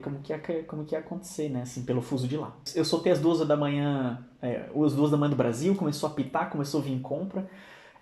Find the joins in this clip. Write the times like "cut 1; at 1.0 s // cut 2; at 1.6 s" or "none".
cut 1; at 2.6 s